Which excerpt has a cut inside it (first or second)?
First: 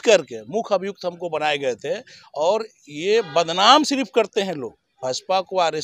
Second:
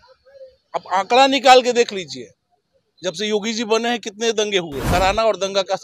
second